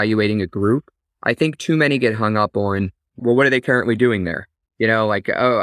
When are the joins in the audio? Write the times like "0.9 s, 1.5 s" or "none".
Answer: 3.2 s